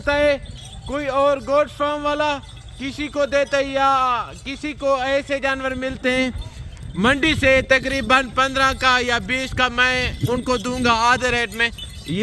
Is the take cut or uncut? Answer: uncut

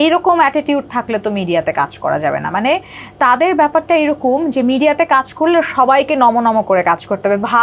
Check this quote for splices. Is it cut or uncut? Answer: uncut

